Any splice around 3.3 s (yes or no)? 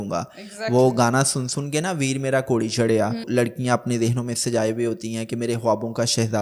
yes